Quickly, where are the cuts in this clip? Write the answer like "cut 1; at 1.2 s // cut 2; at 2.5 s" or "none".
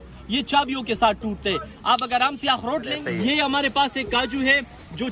cut 1; at 3.0 s

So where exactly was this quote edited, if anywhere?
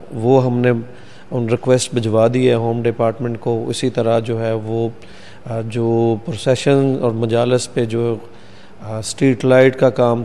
none

